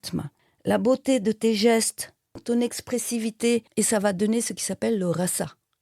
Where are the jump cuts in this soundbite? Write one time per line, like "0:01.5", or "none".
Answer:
0:02.4